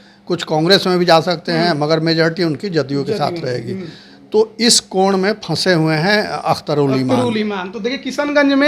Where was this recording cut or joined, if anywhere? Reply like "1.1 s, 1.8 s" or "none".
none